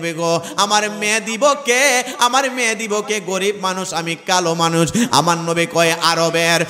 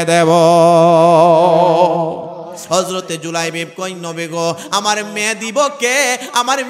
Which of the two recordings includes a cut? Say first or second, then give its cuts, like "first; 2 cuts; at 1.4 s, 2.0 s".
second; 1 cut; at 2.6 s